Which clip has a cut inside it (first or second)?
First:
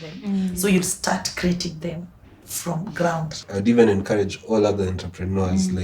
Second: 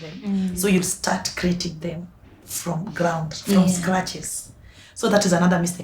first